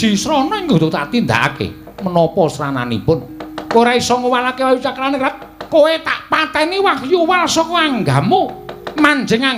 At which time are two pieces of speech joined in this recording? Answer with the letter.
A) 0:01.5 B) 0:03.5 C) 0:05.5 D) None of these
C